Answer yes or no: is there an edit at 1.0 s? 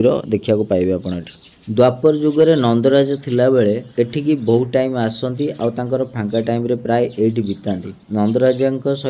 no